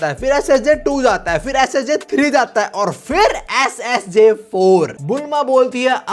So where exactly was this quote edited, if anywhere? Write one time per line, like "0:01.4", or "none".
0:05.0

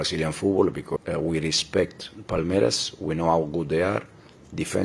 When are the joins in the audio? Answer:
0:01.0

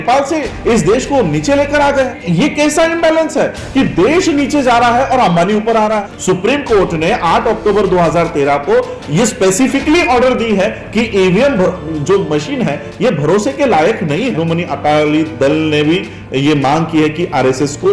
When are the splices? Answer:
0:02.2
0:06.1
0:14.3

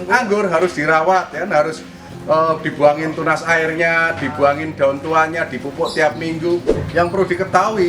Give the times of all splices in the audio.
0:06.8

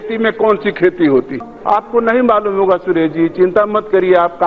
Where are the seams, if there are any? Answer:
0:01.3

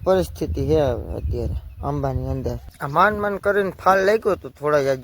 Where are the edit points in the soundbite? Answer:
0:02.7

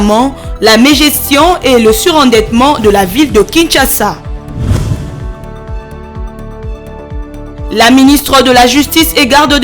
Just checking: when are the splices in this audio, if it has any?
0:04.2

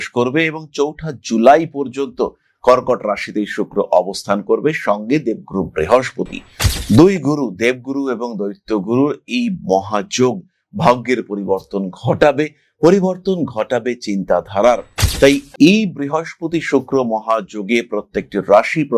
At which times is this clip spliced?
none

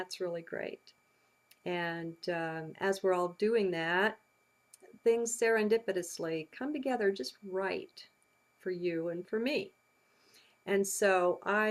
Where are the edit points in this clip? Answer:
none

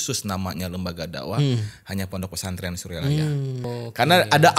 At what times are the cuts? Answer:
0:03.7

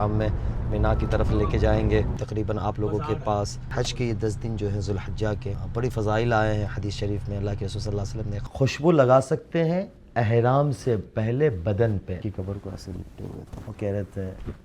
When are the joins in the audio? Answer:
0:02.2
0:03.6
0:05.6
0:08.4
0:12.2
0:13.5

